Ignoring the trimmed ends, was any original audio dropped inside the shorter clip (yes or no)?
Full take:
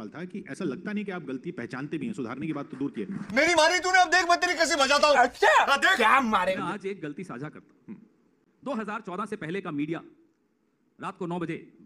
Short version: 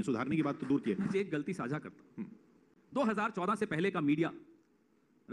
yes